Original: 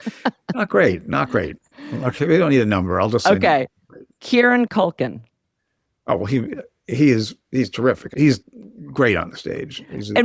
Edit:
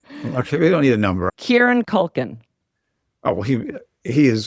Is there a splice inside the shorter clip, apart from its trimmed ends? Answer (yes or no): yes